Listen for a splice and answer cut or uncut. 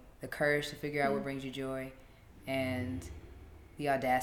uncut